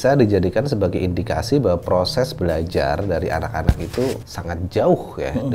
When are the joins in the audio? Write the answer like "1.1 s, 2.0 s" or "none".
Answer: 4.3 s